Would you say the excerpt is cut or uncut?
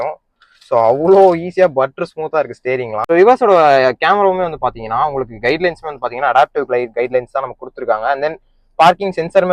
cut